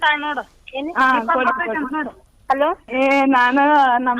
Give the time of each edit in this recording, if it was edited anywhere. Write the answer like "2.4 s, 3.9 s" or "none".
2.8 s